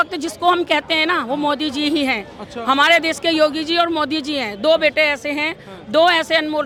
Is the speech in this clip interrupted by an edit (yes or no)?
no